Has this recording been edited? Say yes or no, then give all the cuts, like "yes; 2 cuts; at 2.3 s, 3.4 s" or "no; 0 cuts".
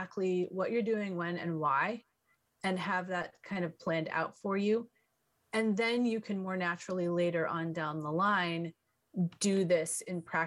no; 0 cuts